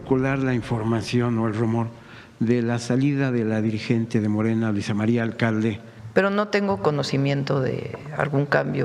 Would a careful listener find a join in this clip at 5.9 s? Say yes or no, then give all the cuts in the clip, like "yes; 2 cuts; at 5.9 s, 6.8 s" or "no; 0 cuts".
yes; 2 cuts; at 5.9 s, 8.0 s